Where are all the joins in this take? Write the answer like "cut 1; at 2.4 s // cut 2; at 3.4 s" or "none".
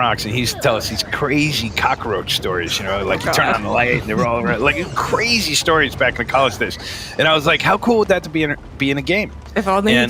none